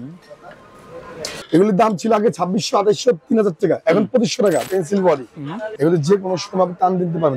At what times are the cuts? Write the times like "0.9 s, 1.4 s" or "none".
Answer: 1.3 s, 4.6 s, 5.7 s